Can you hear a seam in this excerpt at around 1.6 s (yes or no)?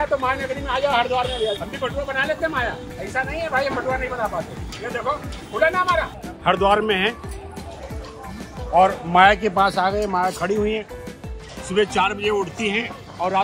yes